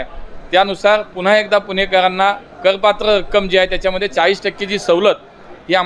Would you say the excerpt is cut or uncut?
uncut